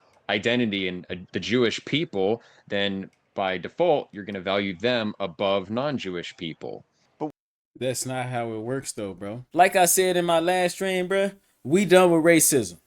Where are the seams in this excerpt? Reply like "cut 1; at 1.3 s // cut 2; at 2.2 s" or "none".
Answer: cut 1; at 9.3 s